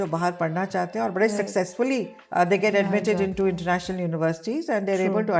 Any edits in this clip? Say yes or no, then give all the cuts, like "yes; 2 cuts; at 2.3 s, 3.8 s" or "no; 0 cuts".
yes; 1 cut; at 2.2 s